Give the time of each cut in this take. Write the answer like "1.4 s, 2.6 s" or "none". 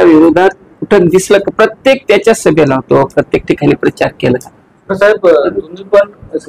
4.9 s